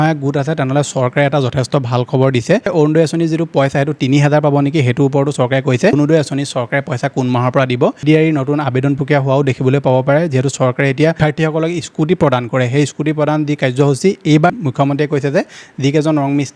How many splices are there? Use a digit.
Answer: 5